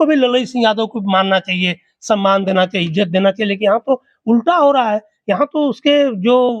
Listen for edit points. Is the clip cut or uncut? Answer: uncut